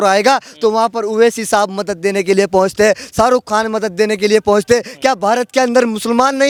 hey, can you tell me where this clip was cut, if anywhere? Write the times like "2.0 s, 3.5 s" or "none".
none